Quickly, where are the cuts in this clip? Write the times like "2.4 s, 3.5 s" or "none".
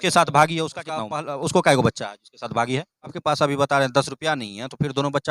1.0 s, 3.2 s